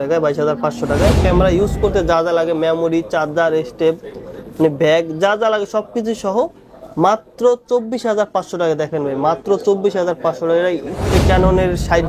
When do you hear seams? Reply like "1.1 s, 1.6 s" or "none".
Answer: 1.2 s, 11.0 s